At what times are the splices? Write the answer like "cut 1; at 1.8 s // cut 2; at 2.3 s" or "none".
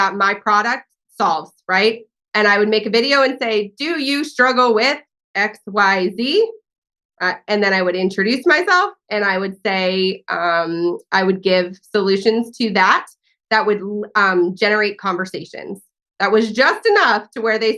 none